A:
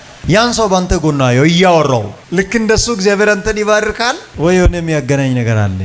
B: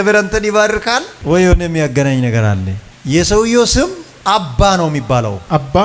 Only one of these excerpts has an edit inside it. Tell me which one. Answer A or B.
A